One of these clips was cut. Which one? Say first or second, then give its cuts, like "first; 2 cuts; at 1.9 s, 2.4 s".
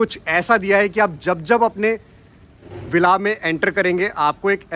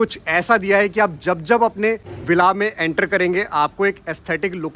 second; 1 cut; at 2.1 s